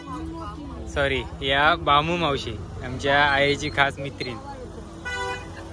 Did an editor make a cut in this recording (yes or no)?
no